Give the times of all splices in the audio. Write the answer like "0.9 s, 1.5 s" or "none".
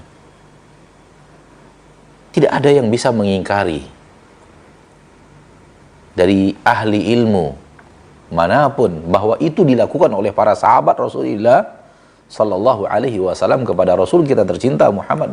2.3 s